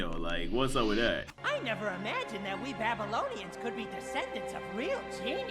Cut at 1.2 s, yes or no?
yes